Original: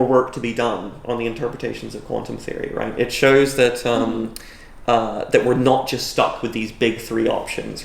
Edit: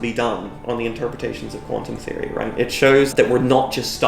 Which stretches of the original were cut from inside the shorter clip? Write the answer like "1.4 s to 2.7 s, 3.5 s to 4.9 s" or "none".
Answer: 3.5 s to 5.3 s